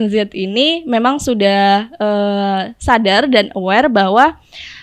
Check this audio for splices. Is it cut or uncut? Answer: uncut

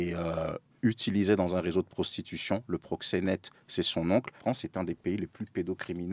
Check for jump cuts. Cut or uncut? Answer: cut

